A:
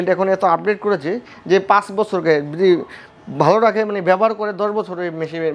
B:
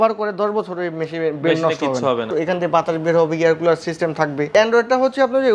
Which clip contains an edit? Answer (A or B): B